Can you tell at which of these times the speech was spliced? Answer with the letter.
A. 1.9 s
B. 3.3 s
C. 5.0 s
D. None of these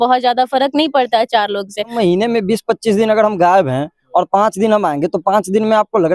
A